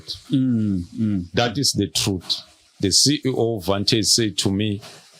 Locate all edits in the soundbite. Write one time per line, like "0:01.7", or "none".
0:02.8